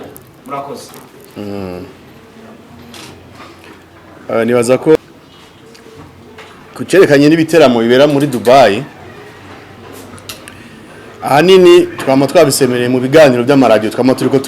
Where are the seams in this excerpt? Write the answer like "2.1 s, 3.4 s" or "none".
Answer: 5.0 s